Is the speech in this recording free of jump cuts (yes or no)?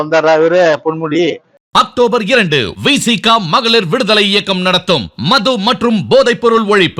no